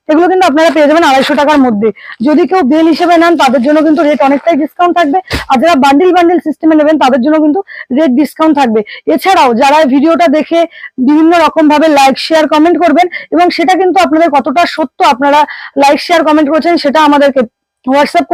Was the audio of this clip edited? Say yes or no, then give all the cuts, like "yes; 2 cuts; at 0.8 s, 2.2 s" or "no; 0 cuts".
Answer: no; 0 cuts